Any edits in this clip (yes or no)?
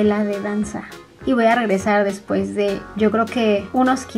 no